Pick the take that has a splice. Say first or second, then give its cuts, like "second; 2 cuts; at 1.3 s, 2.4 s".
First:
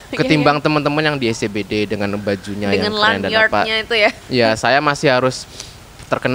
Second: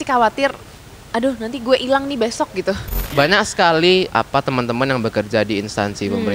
second; 2 cuts; at 2.9 s, 4.1 s